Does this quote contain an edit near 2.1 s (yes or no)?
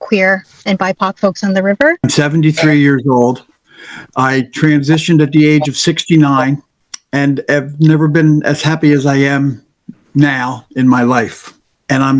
yes